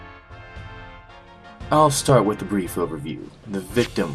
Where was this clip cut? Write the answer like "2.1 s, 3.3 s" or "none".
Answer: 1.0 s